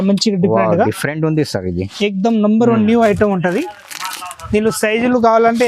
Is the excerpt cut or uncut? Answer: uncut